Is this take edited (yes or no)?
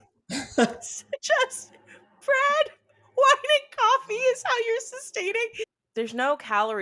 yes